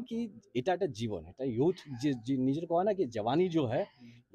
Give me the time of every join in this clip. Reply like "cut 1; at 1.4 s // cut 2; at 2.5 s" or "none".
none